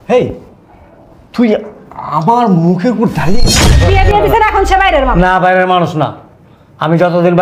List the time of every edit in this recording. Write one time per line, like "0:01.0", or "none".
0:03.6

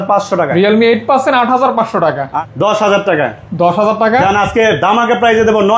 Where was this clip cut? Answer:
0:02.3

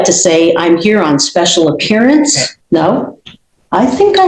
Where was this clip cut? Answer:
0:02.5

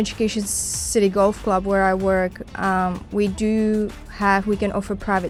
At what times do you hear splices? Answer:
none

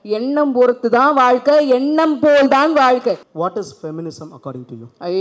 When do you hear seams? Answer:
0:03.3

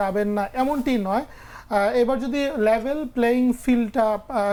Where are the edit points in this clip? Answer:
none

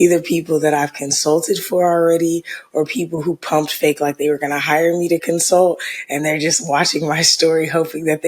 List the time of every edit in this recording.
none

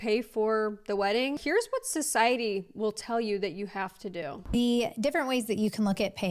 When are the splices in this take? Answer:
0:01.4

